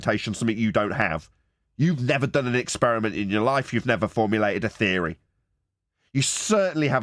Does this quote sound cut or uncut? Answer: uncut